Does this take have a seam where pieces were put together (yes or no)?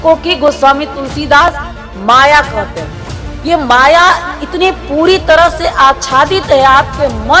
no